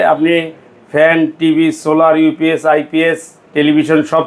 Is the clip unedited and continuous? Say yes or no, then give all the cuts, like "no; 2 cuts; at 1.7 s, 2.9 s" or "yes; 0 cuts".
yes; 0 cuts